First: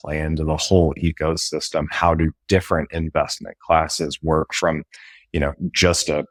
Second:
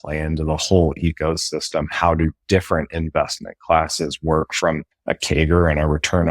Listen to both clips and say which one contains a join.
second; 1 cut; at 4.9 s

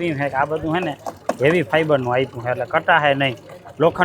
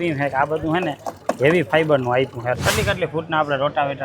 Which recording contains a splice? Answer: second; 1 cut; at 2.6 s

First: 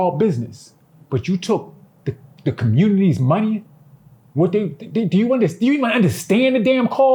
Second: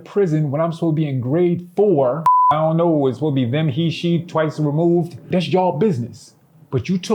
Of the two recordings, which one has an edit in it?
second; 1 cut; at 2.5 s

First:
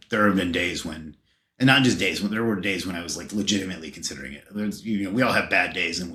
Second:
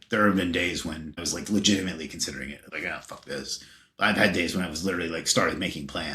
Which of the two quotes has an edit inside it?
second; 2 cuts; at 1.3 s, 2.6 s

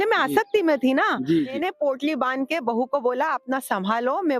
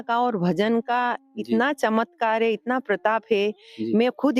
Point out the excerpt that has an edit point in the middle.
first; 1 cut; at 1.5 s

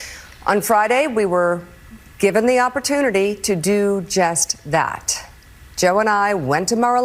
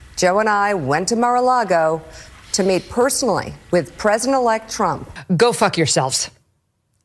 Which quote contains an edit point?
second; 1 cut; at 5.1 s

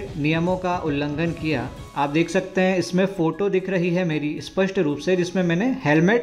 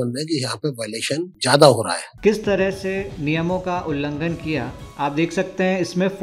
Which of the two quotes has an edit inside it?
second; 2 cuts; at 1.3 s, 2.0 s

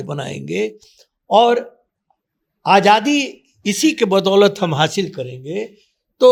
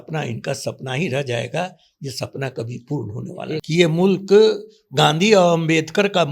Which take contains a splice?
second; 1 cut; at 3.6 s

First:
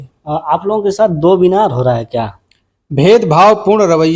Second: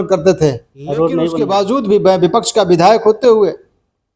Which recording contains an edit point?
second; 1 cut; at 1.4 s

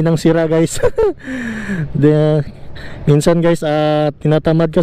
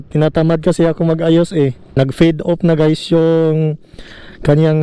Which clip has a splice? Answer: second; 1 cut; at 1.8 s

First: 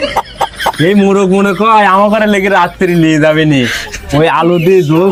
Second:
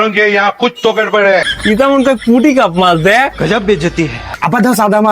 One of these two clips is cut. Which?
second; 2 cuts; at 1.5 s, 4.2 s

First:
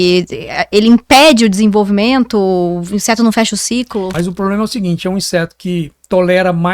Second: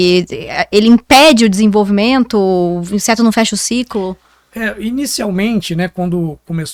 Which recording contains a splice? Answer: first; 1 cut; at 4.1 s

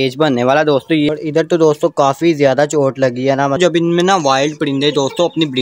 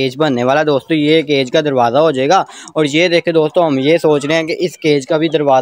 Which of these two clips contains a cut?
first; 2 cuts; at 1.1 s, 3.6 s

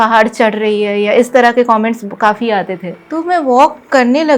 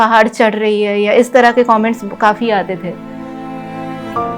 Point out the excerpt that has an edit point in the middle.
first; 1 cut; at 3.0 s

